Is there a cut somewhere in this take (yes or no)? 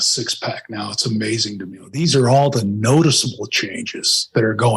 yes